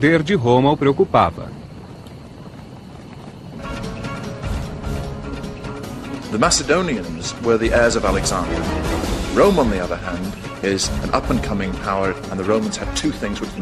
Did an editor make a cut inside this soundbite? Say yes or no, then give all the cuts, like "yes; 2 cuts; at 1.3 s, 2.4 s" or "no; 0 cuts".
no; 0 cuts